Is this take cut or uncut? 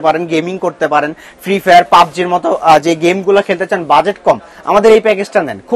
uncut